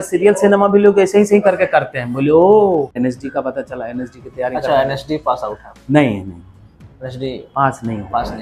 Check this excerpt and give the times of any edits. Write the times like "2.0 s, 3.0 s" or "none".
2.9 s